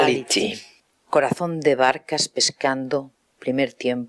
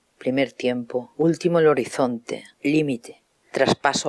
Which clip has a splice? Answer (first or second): second